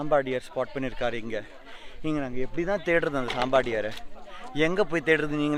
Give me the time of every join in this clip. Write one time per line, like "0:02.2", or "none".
none